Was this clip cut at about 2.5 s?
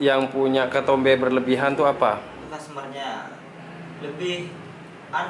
yes; 1 cut; at 2.5 s

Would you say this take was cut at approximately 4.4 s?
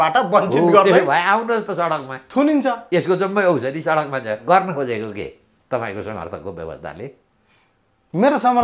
yes; 1 cut; at 4.4 s

